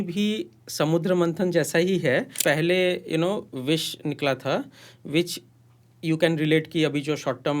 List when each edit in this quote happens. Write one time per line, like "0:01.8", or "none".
0:02.3

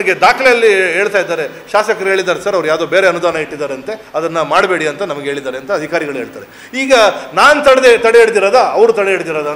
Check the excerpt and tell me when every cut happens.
none

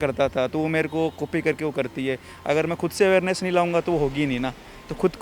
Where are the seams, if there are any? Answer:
none

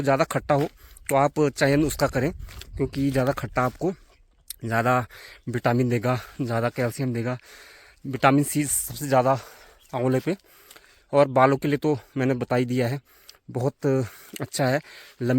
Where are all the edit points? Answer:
none

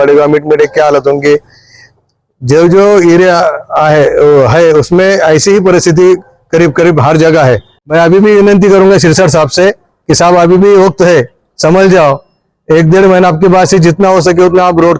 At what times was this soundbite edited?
0:07.8

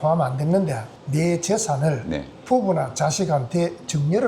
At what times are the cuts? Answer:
0:00.9

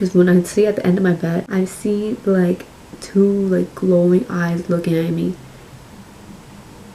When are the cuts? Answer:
0:01.4

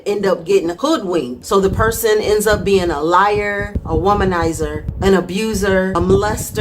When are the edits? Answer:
0:01.2

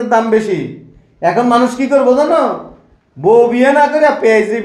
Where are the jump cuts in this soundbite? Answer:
none

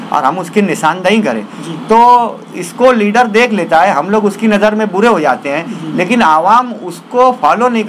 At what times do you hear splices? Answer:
none

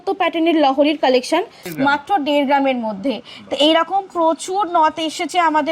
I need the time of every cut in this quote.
0:01.6

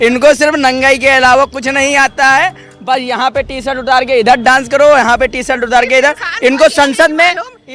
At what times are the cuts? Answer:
none

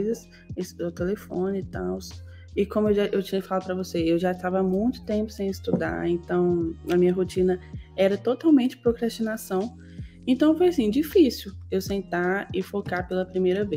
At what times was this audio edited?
none

